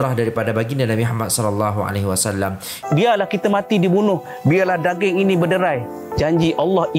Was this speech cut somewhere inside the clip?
yes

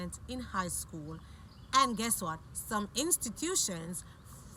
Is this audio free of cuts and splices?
yes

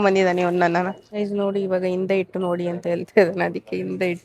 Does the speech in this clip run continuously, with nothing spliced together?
no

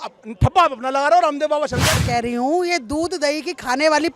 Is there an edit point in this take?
yes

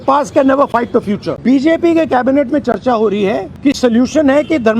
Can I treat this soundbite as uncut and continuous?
no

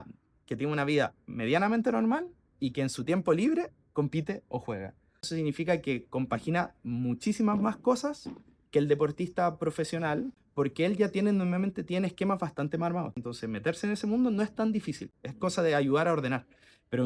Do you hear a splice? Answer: yes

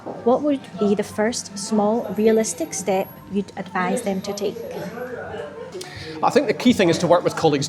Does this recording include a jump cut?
no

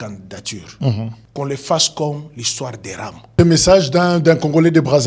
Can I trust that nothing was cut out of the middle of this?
no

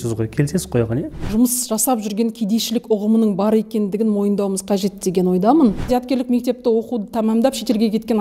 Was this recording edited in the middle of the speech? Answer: yes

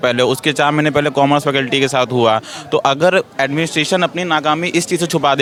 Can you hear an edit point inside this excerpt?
no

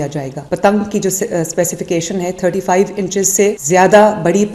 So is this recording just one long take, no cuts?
yes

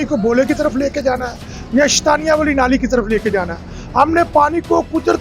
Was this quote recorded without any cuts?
yes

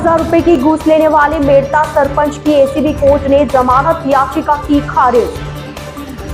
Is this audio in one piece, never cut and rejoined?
yes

